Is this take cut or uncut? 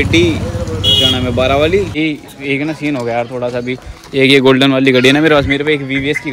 cut